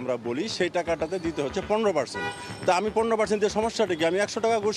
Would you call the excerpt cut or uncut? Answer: uncut